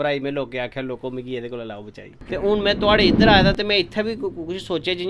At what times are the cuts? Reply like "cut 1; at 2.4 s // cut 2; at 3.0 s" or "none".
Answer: cut 1; at 2.2 s